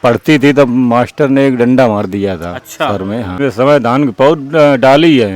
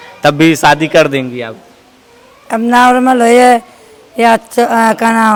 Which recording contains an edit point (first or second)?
first